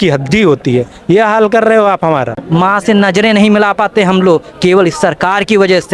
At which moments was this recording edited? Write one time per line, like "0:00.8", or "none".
0:02.4